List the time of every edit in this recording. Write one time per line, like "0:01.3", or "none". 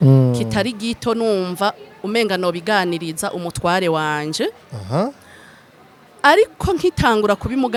none